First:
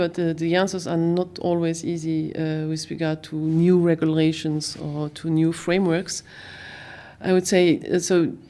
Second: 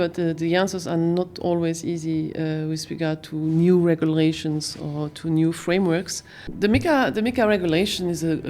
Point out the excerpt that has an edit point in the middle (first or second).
second